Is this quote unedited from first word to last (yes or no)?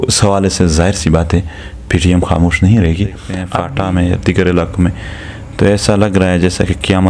no